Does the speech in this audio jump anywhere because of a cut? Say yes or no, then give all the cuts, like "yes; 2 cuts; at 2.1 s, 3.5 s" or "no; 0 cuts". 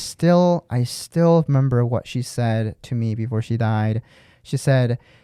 no; 0 cuts